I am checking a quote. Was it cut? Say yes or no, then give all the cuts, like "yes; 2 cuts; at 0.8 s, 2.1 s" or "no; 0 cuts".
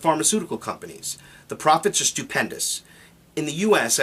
no; 0 cuts